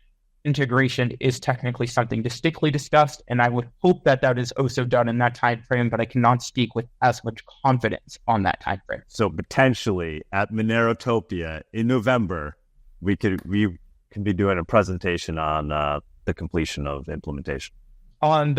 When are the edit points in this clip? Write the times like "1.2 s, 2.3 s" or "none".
9.0 s